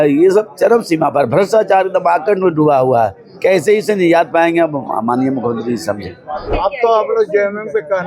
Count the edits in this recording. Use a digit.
1